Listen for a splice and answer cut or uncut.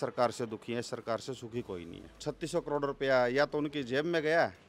cut